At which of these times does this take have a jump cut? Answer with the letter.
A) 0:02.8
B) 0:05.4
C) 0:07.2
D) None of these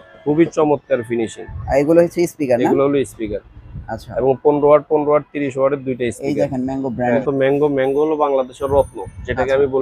C